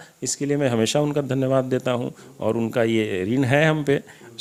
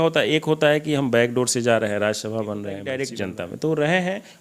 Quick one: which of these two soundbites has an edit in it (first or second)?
second